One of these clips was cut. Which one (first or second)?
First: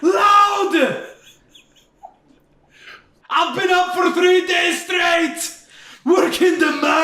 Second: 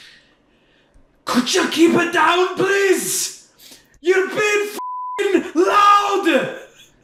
first